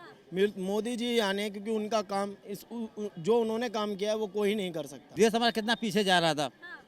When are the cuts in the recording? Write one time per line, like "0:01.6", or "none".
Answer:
0:05.1